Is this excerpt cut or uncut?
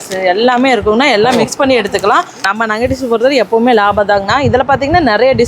cut